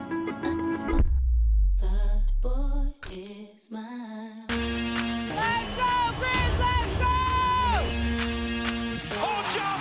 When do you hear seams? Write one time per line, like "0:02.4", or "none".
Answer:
0:04.4